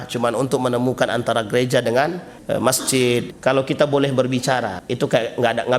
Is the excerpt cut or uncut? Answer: cut